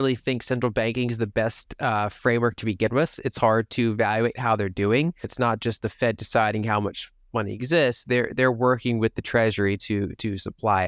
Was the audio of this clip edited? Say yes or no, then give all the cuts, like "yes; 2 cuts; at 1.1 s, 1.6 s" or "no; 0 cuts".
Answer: yes; 1 cut; at 5.3 s